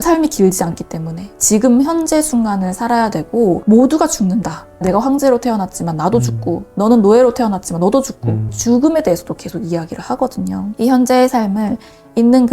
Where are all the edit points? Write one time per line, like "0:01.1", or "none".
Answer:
none